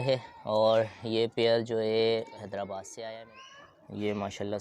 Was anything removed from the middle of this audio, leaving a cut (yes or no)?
yes